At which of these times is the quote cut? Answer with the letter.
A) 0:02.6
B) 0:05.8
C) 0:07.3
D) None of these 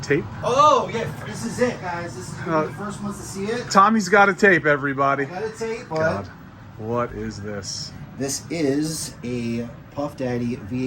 B